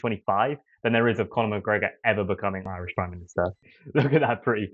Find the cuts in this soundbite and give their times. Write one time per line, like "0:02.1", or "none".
0:03.6